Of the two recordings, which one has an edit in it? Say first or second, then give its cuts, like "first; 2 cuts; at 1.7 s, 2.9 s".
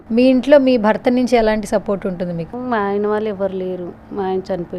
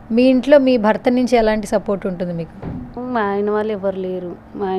first; 1 cut; at 2.5 s